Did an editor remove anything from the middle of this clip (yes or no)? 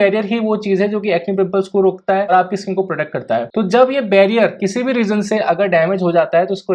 no